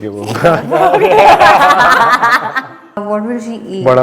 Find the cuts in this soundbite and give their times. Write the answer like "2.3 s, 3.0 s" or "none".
3.0 s